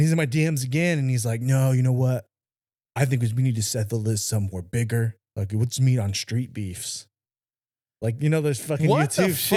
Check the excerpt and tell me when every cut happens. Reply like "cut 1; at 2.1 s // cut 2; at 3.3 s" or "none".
none